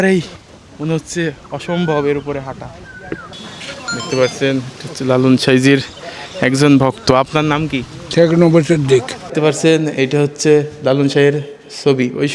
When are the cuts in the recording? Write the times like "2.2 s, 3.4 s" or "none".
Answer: 3.4 s, 9.2 s